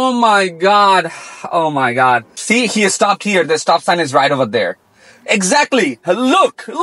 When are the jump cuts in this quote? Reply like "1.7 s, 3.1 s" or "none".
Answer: 2.3 s